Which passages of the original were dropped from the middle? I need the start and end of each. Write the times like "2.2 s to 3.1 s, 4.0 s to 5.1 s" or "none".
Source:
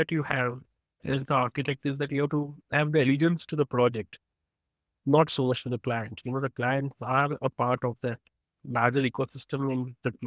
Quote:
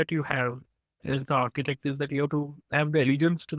none